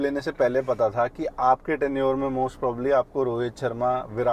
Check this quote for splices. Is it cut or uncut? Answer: uncut